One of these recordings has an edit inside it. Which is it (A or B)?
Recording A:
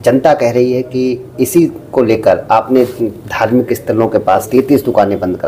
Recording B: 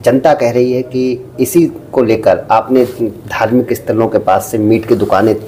A